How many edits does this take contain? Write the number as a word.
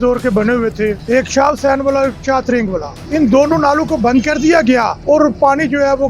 three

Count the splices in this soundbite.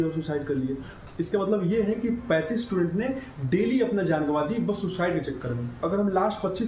two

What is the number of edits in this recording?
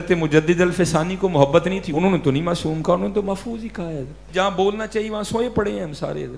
two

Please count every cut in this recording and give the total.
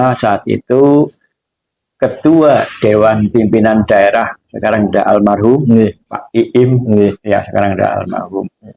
zero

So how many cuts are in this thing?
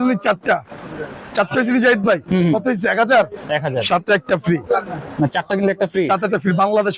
zero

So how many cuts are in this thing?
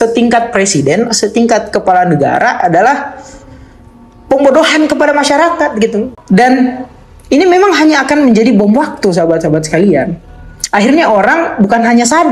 one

